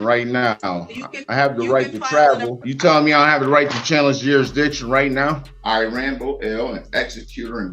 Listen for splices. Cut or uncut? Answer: cut